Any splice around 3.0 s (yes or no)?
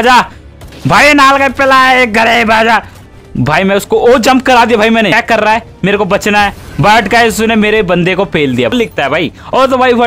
yes